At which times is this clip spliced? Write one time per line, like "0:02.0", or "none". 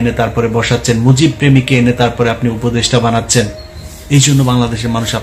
none